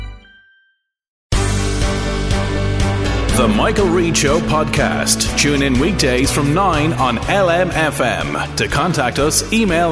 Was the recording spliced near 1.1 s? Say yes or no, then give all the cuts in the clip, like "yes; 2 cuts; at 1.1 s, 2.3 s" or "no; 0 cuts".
yes; 1 cut; at 1.1 s